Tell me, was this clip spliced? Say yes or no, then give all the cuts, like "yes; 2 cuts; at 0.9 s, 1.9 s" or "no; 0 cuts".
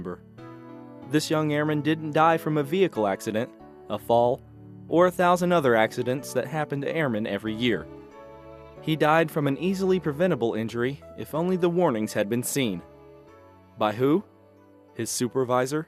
no; 0 cuts